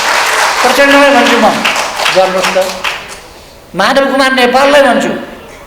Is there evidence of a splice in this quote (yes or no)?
no